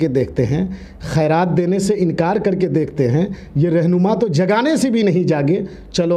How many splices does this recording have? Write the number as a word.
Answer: zero